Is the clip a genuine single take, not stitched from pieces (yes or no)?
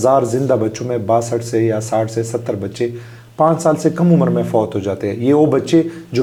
yes